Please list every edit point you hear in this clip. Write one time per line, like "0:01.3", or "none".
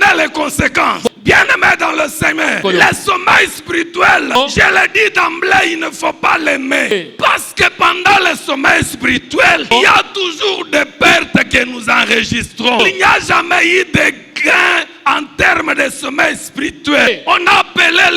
0:01.1
0:02.6
0:04.3
0:06.9
0:09.7
0:12.8
0:17.1